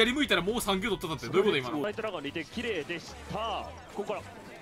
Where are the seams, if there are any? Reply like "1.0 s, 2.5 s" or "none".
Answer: 1.8 s

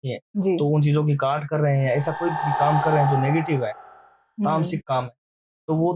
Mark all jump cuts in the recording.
none

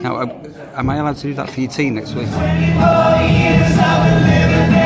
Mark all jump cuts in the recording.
2.3 s

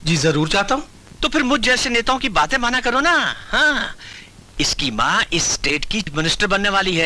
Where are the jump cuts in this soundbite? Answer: 6.1 s

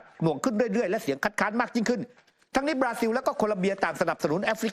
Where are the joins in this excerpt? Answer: 2.2 s

